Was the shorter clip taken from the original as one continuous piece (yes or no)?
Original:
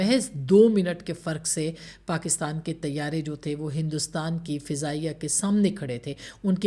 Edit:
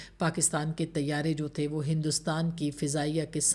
yes